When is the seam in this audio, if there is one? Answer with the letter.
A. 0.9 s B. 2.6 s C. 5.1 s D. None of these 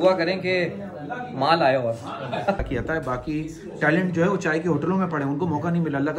B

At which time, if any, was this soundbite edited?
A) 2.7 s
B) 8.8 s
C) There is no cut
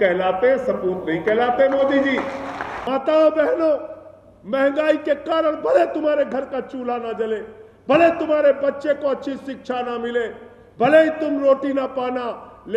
A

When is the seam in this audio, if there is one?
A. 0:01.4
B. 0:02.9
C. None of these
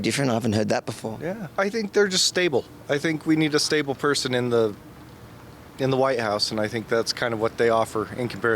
A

